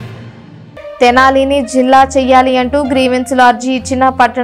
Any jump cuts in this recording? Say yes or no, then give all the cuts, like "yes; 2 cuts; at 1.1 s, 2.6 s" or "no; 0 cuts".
yes; 1 cut; at 1.0 s